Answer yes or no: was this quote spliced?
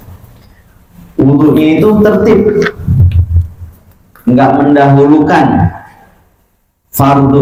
no